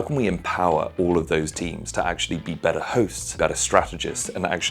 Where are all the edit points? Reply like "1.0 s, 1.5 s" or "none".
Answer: 3.2 s